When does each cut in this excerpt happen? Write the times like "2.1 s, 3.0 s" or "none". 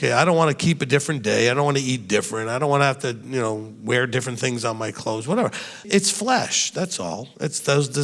5.8 s